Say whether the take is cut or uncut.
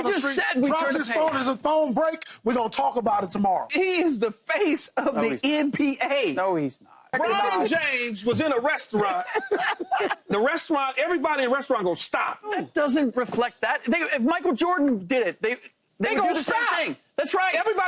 cut